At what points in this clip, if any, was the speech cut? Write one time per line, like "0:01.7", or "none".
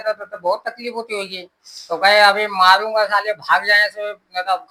none